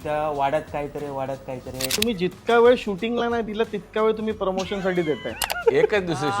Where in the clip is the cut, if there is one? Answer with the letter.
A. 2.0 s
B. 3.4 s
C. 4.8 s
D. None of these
A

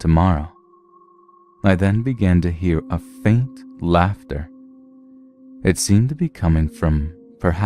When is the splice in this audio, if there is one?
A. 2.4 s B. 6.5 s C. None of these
A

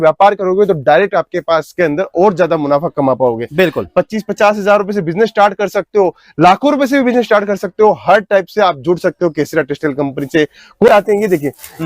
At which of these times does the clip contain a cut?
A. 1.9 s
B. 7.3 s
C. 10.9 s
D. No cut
C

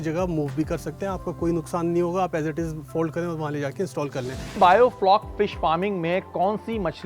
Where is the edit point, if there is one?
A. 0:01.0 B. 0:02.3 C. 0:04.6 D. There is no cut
C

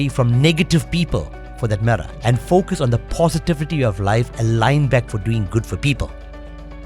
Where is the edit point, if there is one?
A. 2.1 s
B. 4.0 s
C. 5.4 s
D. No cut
A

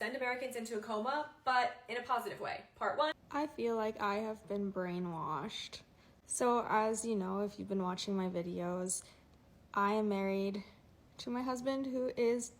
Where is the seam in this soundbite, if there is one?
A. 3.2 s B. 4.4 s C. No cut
A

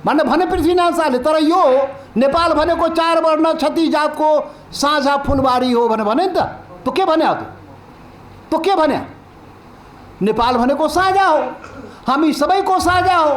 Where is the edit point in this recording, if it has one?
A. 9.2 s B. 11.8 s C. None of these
C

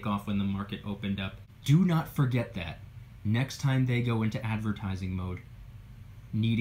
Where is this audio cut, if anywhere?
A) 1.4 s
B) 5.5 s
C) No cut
A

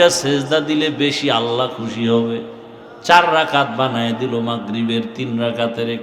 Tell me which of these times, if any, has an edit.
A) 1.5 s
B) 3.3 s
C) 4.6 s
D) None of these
D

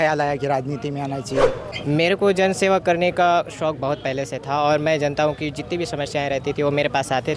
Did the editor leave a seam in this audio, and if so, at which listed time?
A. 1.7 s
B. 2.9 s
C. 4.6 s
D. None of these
A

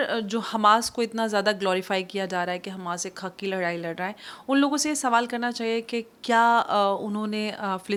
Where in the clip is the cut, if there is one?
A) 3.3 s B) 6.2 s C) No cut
C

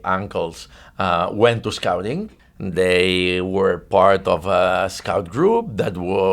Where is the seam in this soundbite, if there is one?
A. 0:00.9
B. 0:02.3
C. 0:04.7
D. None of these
B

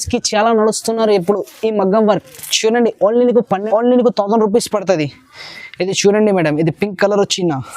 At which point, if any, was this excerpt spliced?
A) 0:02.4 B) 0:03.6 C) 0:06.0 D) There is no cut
B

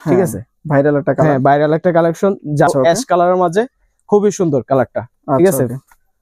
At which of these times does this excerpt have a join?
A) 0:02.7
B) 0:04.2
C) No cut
A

